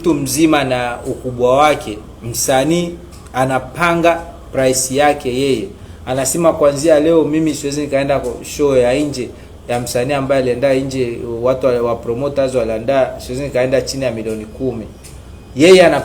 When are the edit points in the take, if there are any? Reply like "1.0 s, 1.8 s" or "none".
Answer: none